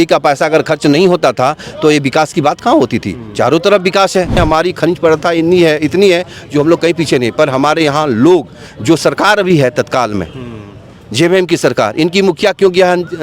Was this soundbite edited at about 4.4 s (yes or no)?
yes